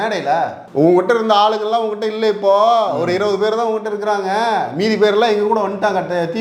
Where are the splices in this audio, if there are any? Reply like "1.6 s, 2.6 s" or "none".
none